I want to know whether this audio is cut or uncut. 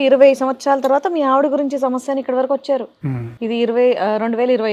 uncut